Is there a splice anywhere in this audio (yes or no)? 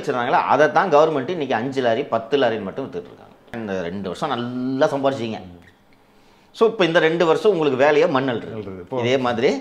yes